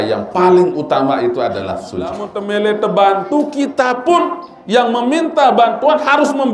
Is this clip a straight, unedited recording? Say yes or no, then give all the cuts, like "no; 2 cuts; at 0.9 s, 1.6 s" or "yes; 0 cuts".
no; 1 cut; at 2.3 s